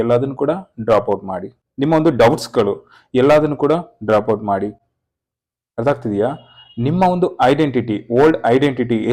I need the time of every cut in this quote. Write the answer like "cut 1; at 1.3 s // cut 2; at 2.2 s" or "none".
none

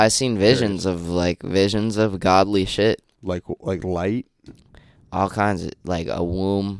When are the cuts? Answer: cut 1; at 3.1 s

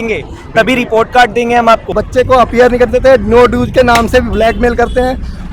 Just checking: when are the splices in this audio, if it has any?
cut 1; at 1.9 s

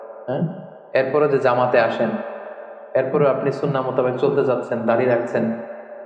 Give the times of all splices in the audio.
none

